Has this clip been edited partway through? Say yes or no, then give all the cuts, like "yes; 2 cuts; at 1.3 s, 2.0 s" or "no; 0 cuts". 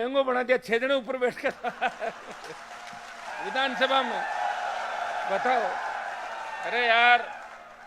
yes; 1 cut; at 3.3 s